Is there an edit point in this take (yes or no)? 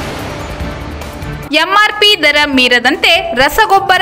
yes